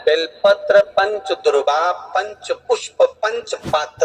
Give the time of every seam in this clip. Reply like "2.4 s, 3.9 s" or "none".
none